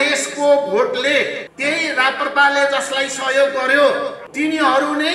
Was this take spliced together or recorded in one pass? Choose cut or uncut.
cut